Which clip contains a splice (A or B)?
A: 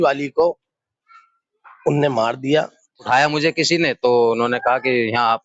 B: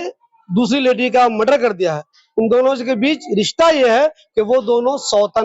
A